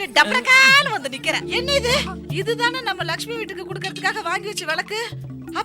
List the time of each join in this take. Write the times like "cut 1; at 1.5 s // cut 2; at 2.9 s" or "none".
cut 1; at 1.4 s